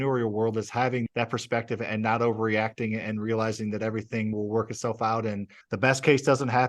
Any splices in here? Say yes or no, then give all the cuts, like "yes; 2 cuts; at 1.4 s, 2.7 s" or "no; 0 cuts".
yes; 3 cuts; at 1.0 s, 4.4 s, 5.5 s